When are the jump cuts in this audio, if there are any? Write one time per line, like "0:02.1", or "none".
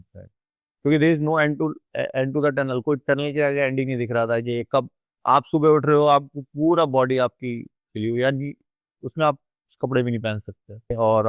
none